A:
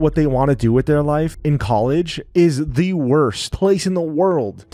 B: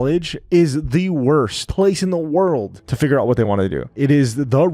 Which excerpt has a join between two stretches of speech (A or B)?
B